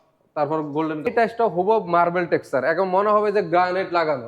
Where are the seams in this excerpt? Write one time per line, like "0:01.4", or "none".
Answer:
0:01.1